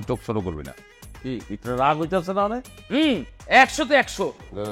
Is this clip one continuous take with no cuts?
yes; 0 cuts

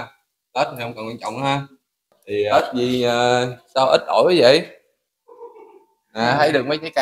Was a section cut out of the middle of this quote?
yes; 1 cut; at 2.5 s

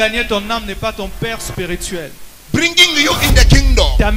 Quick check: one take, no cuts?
no; 1 cut; at 2.2 s

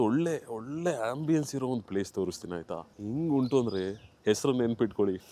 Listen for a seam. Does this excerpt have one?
no; 0 cuts

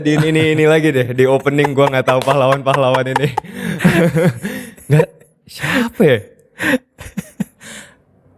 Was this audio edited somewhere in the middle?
no; 0 cuts

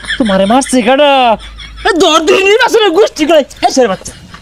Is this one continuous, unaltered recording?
yes; 0 cuts

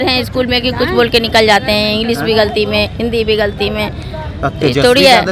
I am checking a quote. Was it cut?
no; 0 cuts

